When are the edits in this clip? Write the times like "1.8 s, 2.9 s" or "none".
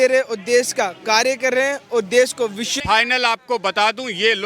2.7 s